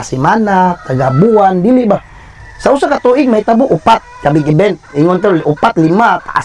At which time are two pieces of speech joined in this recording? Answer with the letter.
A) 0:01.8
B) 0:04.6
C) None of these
C